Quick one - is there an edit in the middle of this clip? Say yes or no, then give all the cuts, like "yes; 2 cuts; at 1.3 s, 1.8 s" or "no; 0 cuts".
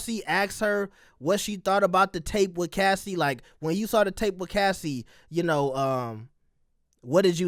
no; 0 cuts